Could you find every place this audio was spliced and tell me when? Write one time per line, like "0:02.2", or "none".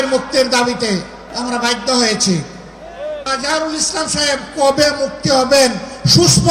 0:01.2
0:03.3